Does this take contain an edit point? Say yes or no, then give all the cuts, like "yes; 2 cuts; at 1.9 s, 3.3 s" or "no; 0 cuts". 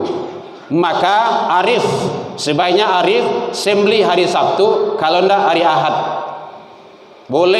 no; 0 cuts